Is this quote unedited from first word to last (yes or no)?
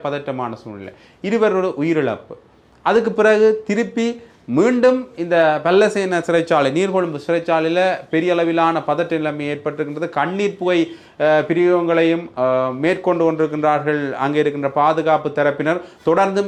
yes